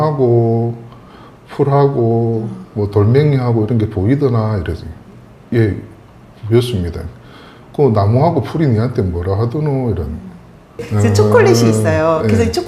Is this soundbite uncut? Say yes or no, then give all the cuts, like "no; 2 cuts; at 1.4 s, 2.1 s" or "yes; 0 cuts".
no; 1 cut; at 10.9 s